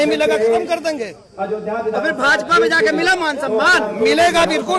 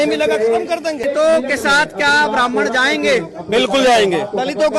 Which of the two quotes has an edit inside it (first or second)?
second